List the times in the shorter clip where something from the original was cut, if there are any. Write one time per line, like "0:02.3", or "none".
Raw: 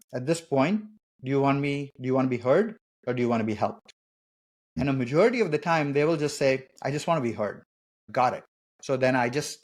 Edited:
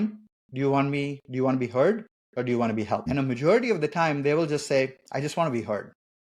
0:03.0